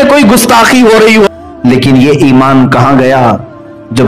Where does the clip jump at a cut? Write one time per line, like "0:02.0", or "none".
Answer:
0:01.3